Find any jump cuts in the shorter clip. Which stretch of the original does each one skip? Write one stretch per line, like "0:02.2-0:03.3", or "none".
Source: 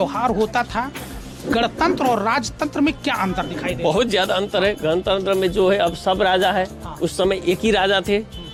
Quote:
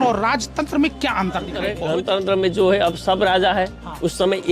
0:03.7-0:04.6